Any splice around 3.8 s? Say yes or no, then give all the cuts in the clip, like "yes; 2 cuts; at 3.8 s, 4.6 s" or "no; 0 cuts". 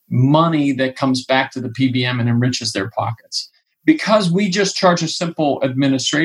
no; 0 cuts